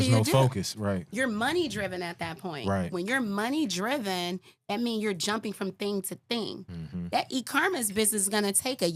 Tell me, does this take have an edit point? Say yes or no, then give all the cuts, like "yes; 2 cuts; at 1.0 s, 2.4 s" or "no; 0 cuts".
no; 0 cuts